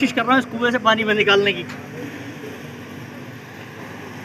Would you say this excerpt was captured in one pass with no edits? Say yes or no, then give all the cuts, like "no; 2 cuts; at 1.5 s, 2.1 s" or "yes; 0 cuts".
yes; 0 cuts